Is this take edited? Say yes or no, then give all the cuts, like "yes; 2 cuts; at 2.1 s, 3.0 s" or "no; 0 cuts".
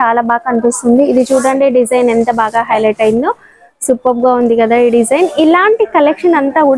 no; 0 cuts